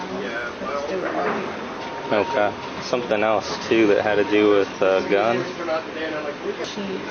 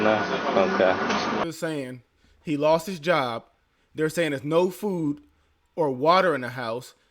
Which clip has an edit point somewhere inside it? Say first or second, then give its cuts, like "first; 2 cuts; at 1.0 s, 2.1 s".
second; 1 cut; at 1.5 s